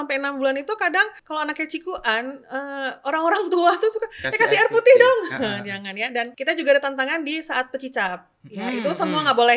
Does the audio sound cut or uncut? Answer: cut